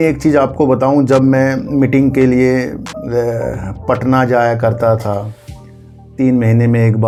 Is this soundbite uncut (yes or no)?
yes